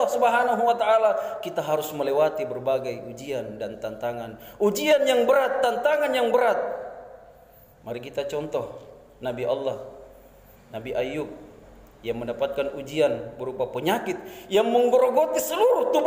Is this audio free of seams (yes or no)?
yes